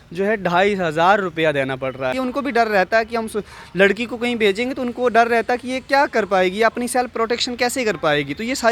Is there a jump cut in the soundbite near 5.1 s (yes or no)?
no